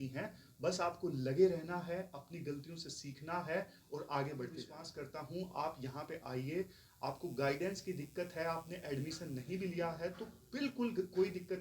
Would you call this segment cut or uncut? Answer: cut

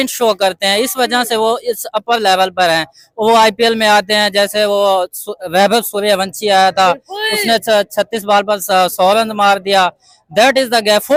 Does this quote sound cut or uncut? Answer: uncut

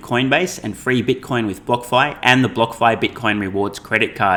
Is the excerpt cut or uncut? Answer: uncut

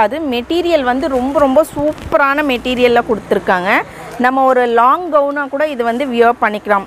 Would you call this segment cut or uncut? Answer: uncut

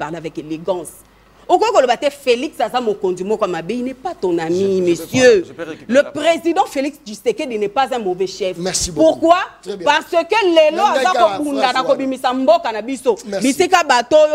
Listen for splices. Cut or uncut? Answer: uncut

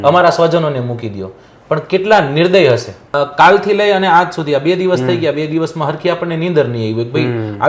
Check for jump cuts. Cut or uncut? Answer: cut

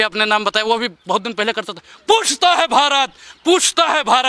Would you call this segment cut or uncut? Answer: uncut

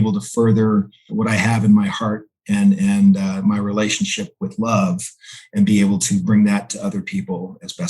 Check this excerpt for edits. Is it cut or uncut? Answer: cut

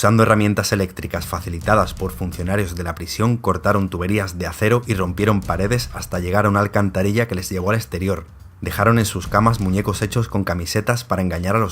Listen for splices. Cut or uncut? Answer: uncut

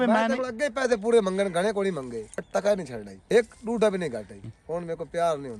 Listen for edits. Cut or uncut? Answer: cut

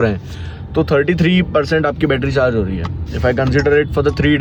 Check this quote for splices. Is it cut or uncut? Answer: uncut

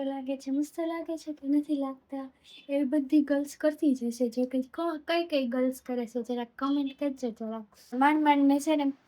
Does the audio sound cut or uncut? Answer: cut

